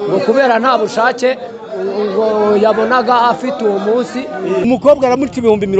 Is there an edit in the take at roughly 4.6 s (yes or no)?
yes